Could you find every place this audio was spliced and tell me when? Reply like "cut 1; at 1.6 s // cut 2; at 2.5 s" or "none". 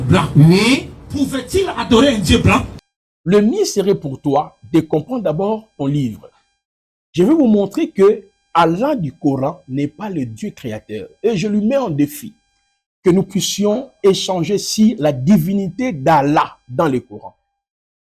cut 1; at 2.8 s